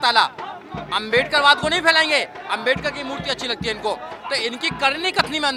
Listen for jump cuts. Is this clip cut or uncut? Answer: uncut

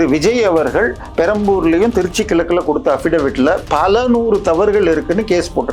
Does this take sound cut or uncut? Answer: uncut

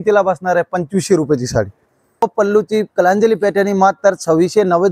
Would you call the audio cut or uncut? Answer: cut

